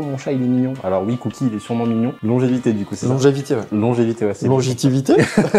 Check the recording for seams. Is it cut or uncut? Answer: cut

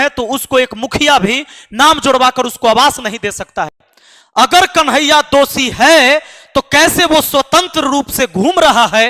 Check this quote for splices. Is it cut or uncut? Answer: cut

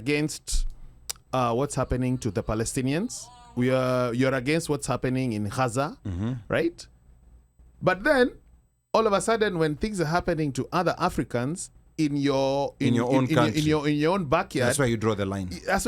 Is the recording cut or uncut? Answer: uncut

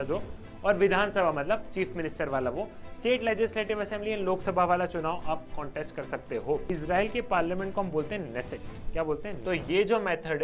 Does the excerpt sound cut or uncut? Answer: cut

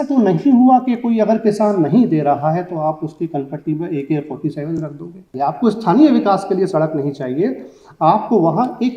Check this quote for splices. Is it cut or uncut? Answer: cut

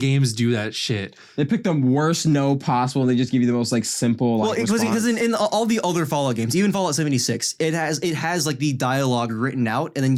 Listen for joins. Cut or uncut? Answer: uncut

